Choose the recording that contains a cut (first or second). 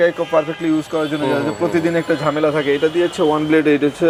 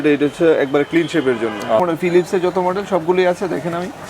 second